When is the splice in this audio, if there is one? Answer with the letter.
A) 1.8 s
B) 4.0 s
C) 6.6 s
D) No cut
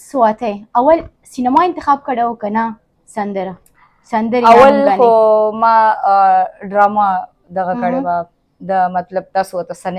D